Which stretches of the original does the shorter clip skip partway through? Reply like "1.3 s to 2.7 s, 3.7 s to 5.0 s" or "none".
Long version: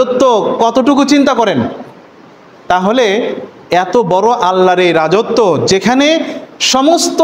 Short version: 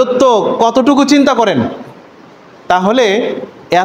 none